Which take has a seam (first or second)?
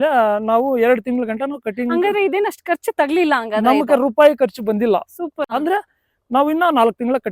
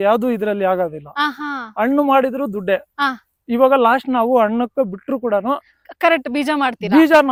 first